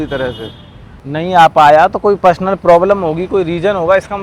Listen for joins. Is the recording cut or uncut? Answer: cut